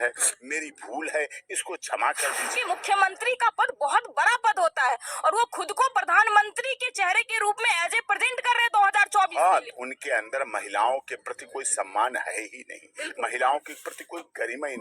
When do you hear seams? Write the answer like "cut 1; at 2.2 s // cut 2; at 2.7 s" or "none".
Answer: cut 1; at 2.5 s // cut 2; at 9.7 s